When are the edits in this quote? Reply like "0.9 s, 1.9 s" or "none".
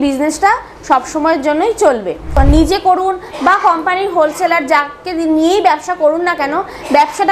2.3 s